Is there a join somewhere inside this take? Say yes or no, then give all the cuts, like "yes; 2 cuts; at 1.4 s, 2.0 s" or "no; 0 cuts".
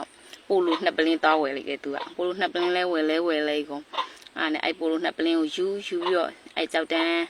no; 0 cuts